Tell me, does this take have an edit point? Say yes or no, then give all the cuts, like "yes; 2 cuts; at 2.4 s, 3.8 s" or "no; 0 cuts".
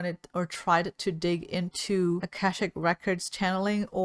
yes; 1 cut; at 2.3 s